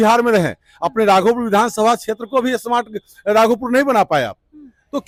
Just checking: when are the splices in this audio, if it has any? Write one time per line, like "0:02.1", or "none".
none